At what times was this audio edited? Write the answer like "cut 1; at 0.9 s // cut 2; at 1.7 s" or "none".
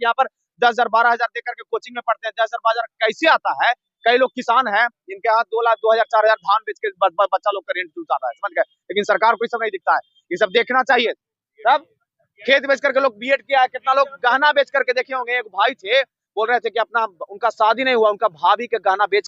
none